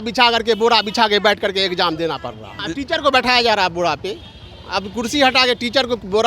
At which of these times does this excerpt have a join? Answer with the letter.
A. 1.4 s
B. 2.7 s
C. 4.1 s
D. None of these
B